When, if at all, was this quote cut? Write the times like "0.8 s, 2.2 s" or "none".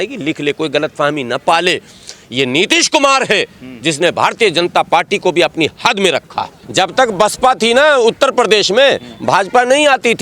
6.6 s